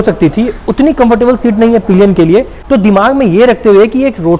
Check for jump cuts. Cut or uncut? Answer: uncut